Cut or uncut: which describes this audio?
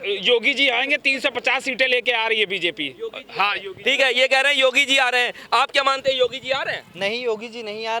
uncut